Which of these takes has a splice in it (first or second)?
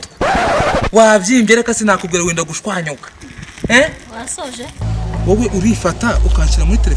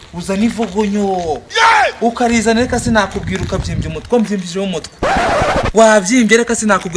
first